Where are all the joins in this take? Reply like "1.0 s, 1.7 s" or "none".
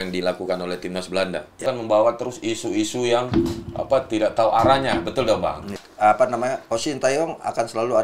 1.6 s, 5.8 s